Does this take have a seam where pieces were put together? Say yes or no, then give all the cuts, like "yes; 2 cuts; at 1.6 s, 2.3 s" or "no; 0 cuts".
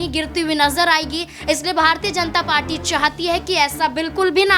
no; 0 cuts